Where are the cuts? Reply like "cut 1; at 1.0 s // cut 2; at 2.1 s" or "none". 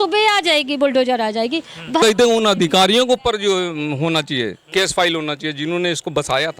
cut 1; at 2.0 s

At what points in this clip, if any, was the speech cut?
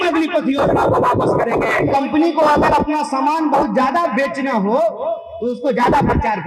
cut 1; at 1.9 s

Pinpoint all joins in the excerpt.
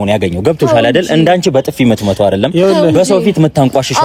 none

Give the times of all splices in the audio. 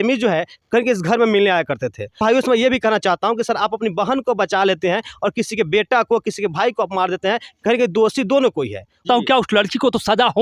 cut 1; at 2.2 s // cut 2; at 9.0 s

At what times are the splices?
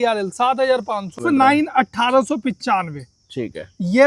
cut 1; at 1.2 s

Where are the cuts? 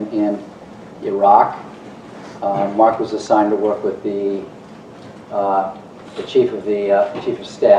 cut 1; at 5.9 s

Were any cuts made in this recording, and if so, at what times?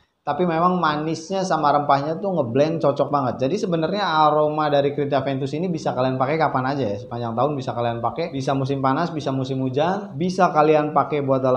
none

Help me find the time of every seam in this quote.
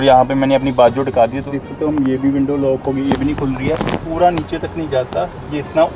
cut 1; at 1.6 s // cut 2; at 4.0 s

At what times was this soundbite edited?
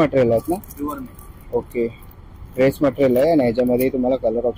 none

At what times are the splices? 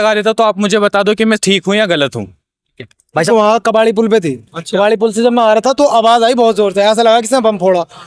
cut 1; at 3.3 s

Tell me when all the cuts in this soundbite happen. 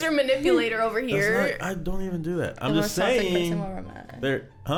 none

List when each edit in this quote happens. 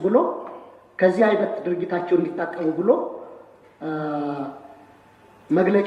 none

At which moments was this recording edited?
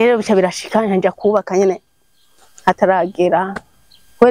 none

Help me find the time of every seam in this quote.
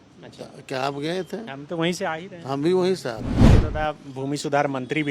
cut 1; at 3.3 s

